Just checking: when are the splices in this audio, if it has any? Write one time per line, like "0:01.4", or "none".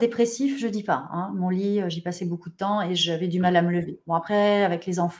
none